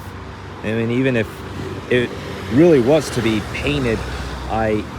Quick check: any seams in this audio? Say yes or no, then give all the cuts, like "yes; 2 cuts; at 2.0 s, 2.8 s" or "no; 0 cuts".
no; 0 cuts